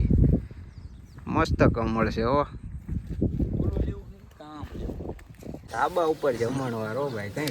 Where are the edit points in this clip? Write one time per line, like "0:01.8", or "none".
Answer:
0:05.6